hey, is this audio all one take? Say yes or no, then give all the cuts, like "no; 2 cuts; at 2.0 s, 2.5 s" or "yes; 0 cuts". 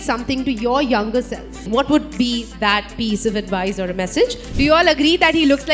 no; 2 cuts; at 1.6 s, 4.4 s